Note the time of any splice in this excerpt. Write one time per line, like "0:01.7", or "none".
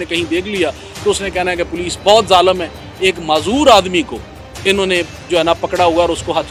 none